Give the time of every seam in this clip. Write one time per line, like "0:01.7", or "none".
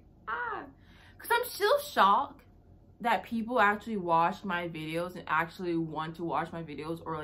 none